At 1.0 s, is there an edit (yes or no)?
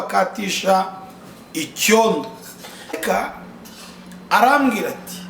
no